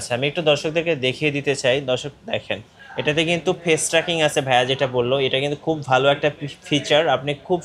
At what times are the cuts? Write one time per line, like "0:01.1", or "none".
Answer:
none